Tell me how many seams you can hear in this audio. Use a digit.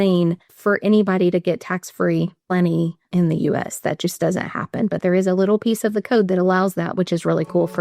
0